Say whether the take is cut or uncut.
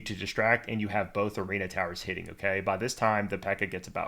uncut